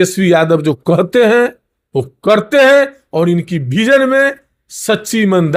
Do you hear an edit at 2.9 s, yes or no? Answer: no